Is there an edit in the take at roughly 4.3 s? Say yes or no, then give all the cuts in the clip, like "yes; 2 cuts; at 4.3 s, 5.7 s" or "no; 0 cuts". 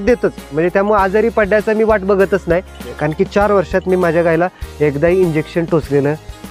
no; 1 cut; at 2.9 s